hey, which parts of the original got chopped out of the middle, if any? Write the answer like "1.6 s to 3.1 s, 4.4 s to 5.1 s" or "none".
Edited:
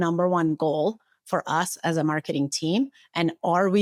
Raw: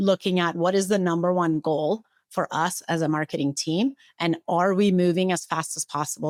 none

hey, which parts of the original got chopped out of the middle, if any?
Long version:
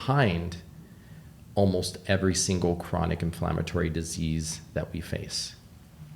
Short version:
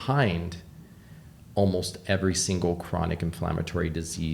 none

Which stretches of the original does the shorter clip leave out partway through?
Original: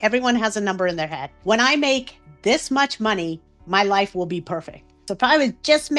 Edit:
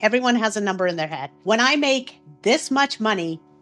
none

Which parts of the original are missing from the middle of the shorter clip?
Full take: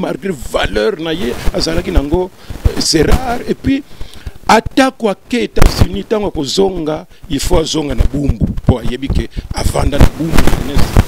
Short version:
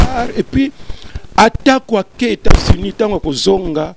none

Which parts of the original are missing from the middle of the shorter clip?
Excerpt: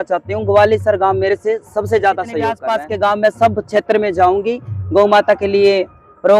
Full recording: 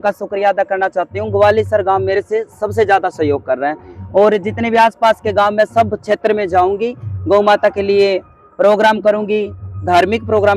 3.4 s to 4.9 s

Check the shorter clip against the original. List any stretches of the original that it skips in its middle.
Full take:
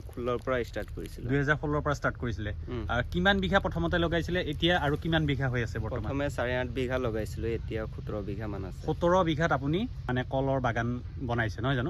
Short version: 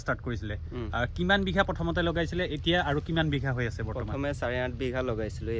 none

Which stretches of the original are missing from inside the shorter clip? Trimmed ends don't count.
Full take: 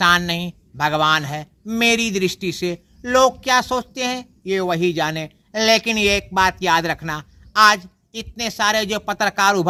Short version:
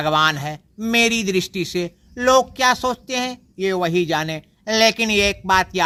none

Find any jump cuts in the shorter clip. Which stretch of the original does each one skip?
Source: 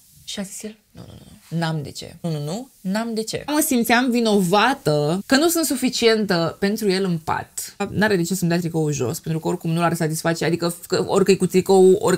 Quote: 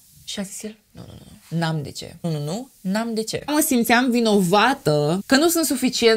none

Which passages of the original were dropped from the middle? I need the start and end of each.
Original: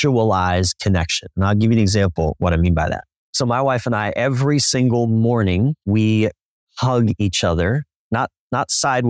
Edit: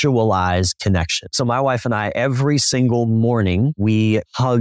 1.2 s to 3.2 s, 5.9 s to 6.3 s

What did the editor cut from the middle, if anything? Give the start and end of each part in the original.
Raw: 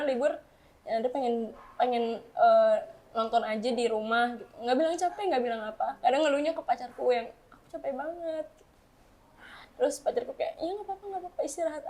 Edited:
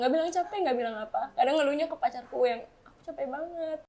none

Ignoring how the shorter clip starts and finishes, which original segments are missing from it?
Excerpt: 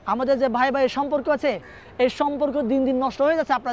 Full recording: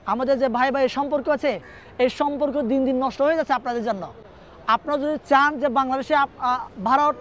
none

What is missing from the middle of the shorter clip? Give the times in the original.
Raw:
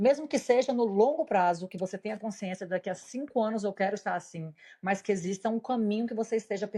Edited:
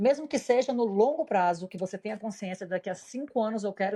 none

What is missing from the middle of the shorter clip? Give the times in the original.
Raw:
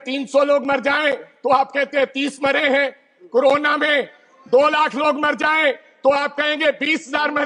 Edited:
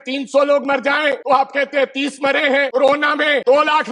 1.2 s to 1.4 s, 3.2 s to 4.0 s

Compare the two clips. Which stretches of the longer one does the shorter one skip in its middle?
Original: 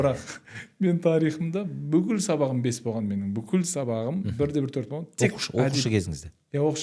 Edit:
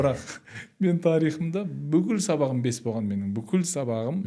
none

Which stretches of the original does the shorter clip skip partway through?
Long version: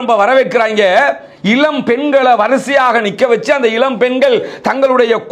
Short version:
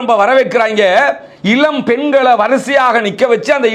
none

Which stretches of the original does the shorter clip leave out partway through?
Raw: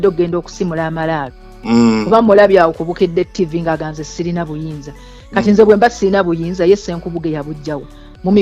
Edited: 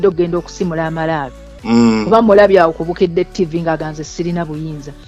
none

